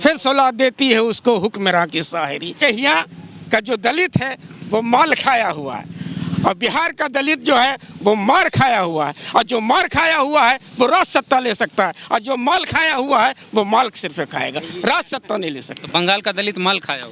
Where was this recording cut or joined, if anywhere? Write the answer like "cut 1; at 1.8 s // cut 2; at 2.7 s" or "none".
cut 1; at 2.6 s